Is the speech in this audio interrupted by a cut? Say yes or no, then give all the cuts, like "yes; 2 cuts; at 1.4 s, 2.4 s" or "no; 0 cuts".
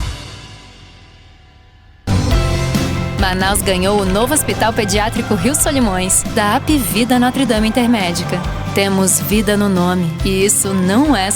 yes; 1 cut; at 1.9 s